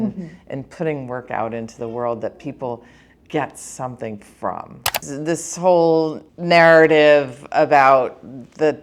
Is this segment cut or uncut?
cut